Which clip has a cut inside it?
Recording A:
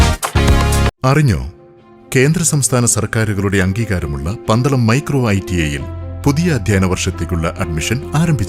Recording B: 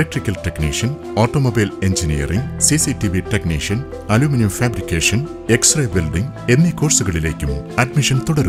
A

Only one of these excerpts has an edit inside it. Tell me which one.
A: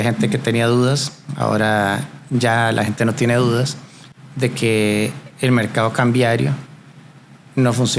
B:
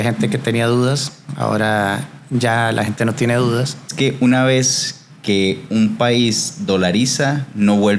B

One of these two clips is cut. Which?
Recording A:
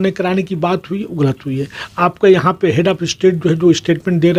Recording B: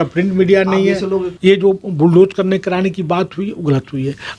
B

